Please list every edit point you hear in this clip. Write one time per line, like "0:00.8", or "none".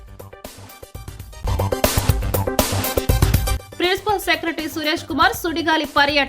0:01.4
0:03.6